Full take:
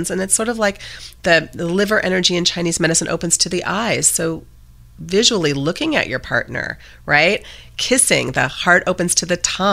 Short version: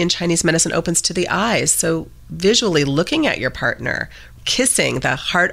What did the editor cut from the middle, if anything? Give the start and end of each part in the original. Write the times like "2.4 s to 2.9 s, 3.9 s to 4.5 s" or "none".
4.6 s to 4.9 s, 6.9 s to 7.5 s